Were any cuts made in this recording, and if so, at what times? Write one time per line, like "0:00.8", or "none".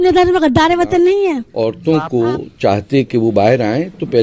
0:01.5